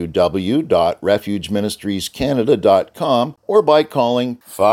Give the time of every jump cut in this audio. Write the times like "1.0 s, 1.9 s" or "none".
3.4 s